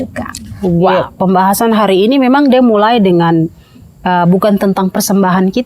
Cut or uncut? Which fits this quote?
cut